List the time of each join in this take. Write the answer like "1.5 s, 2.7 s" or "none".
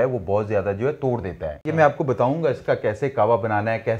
1.5 s